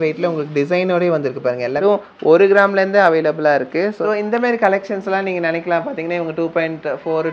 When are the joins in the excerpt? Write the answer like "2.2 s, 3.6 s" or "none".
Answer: 1.8 s, 4.0 s